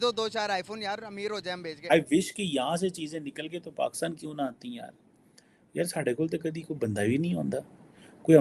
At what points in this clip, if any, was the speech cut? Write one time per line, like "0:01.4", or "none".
0:01.8